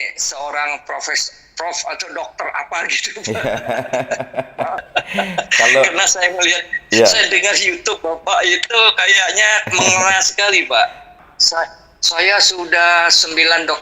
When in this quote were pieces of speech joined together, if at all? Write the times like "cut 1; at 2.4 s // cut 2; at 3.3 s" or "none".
cut 1; at 11.1 s